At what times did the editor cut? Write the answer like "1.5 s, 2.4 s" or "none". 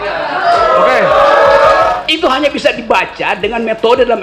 1.9 s